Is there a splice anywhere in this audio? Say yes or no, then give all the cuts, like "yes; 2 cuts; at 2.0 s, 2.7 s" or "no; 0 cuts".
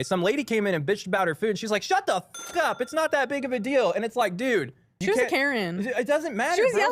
no; 0 cuts